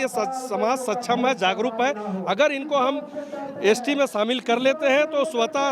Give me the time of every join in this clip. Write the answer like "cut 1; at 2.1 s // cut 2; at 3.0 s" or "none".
none